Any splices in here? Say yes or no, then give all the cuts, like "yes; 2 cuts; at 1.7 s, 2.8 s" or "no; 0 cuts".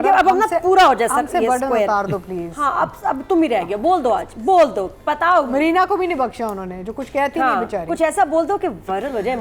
no; 0 cuts